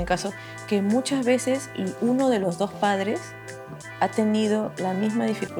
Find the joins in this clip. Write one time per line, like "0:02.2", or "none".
none